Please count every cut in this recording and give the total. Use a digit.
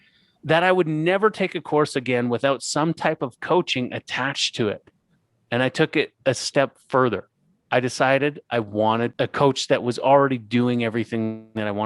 1